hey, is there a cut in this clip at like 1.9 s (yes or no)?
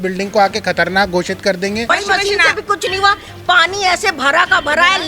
yes